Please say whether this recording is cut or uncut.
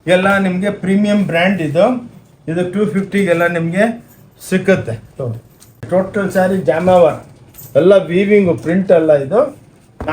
cut